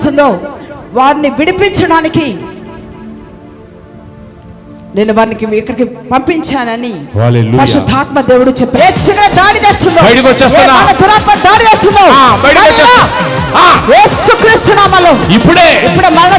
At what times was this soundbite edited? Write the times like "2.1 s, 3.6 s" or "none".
8.7 s